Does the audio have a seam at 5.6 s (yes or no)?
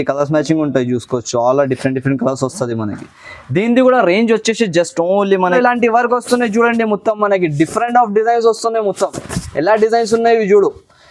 yes